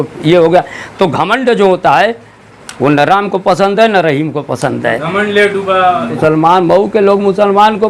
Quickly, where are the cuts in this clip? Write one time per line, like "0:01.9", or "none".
0:06.2